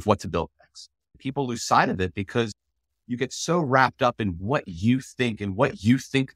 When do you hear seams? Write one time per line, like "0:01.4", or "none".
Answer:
0:01.2
0:02.6